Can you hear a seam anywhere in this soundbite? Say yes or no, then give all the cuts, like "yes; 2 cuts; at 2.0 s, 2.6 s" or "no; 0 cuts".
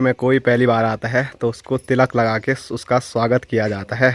no; 0 cuts